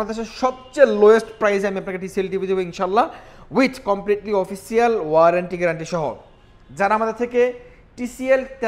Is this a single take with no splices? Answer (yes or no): yes